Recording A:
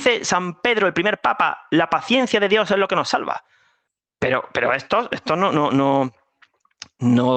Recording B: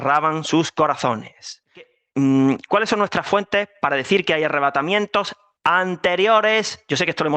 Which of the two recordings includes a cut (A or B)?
B